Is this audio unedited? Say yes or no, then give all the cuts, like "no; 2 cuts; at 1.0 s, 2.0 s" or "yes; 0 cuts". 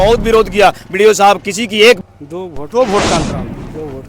no; 1 cut; at 2.0 s